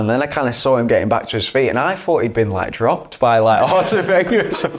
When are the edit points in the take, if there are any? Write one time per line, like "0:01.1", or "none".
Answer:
none